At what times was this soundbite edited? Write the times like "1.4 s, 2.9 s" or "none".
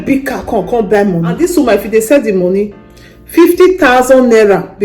1.3 s